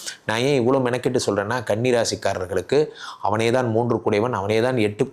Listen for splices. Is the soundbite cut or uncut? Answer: uncut